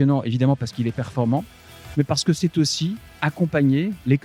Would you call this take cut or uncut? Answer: uncut